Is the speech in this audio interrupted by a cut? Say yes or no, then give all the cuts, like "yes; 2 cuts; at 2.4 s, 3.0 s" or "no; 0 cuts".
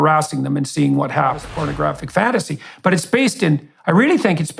yes; 1 cut; at 1.5 s